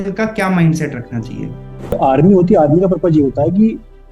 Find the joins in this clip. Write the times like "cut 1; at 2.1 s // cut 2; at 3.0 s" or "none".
cut 1; at 2.0 s